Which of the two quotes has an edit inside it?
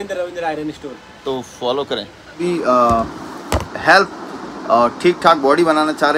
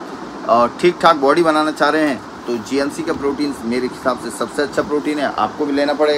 first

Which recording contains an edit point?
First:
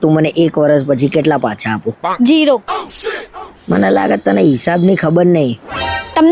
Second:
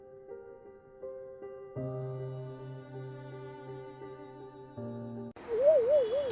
second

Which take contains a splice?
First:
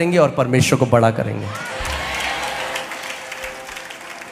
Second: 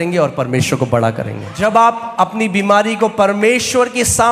second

